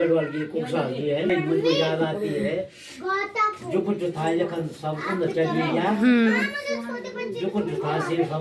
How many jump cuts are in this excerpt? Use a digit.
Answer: 1